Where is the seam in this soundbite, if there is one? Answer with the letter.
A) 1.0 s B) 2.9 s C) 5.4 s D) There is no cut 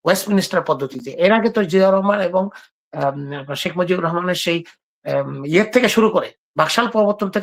D